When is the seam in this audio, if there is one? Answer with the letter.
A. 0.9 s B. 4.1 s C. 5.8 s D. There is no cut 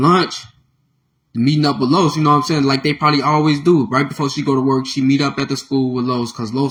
D